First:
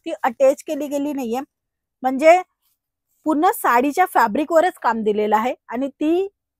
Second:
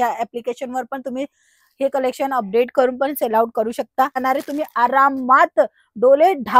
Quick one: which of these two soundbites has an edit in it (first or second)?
second